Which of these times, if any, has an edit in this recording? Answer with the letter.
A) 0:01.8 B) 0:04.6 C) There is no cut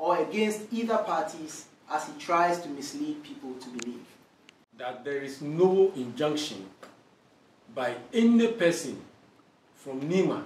B